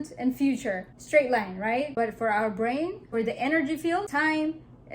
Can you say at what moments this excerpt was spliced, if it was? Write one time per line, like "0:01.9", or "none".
0:00.9
0:01.9
0:03.0
0:04.1